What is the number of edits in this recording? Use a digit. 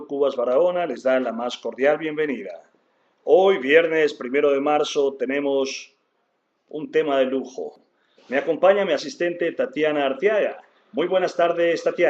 1